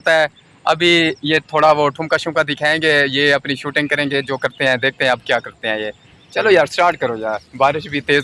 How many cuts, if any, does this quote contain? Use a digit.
0